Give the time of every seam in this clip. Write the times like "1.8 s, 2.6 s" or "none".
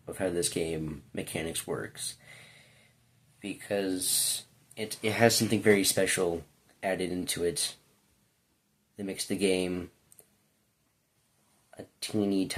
none